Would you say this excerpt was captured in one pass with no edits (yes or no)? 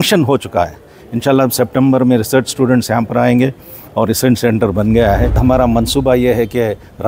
no